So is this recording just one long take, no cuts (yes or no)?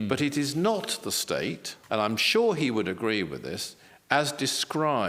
no